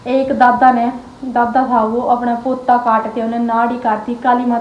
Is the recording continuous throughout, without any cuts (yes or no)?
yes